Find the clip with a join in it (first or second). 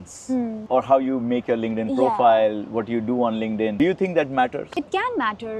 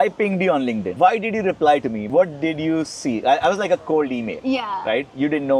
second